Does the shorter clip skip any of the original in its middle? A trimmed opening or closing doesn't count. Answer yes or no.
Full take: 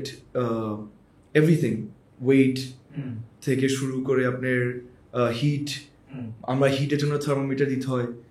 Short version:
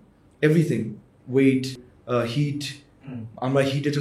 yes